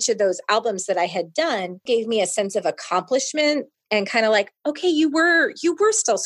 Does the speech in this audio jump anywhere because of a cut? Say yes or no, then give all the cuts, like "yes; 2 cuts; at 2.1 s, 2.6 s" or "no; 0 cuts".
yes; 1 cut; at 1.8 s